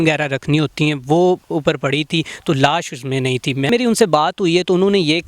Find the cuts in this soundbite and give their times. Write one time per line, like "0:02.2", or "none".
0:03.7